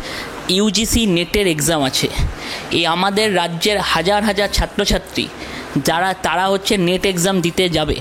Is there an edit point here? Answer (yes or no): no